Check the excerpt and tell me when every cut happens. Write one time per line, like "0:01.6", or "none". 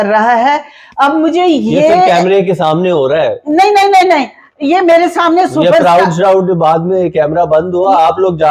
none